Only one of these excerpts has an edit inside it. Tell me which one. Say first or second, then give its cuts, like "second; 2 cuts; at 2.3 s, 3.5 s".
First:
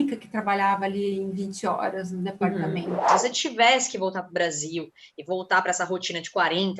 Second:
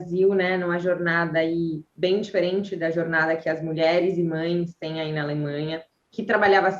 first; 1 cut; at 3.1 s